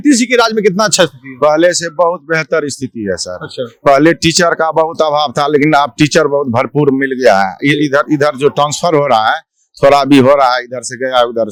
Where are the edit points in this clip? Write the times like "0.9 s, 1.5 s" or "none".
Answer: none